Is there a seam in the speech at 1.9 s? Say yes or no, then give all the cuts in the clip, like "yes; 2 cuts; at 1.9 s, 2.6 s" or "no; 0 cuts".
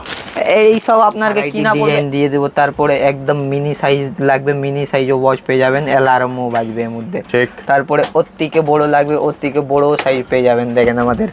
yes; 1 cut; at 1.9 s